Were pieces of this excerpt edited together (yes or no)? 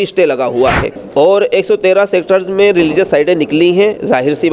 yes